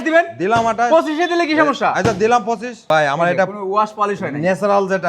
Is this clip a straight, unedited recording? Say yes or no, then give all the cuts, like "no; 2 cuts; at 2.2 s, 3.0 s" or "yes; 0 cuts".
no; 1 cut; at 2.7 s